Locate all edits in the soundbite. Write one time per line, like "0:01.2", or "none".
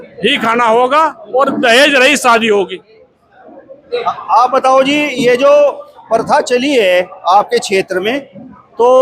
none